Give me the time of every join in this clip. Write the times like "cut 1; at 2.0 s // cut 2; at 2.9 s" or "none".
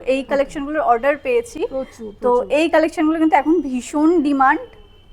none